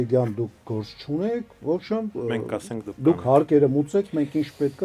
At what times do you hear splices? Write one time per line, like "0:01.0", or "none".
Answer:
none